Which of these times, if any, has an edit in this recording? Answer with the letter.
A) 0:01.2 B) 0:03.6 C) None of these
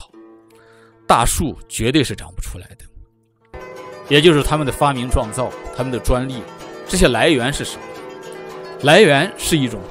B